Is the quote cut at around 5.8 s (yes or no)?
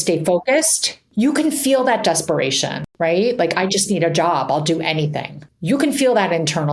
no